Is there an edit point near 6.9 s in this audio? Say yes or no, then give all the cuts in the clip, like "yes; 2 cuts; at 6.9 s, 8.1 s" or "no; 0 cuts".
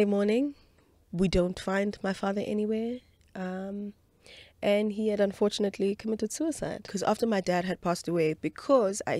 yes; 1 cut; at 6.9 s